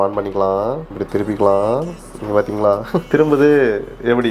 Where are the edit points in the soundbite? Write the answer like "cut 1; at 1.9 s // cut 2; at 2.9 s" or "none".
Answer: cut 1; at 0.9 s // cut 2; at 3.1 s